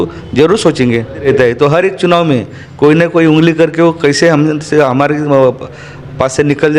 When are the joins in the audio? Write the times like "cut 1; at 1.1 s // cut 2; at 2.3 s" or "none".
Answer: cut 1; at 1.3 s

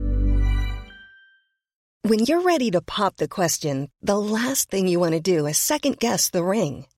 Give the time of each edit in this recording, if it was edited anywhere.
cut 1; at 1.8 s

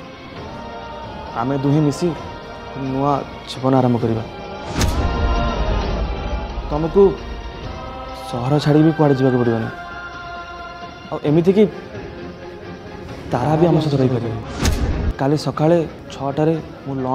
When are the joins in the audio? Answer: cut 1; at 15.1 s // cut 2; at 16.0 s

